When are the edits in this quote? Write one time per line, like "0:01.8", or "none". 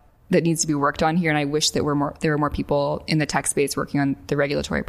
none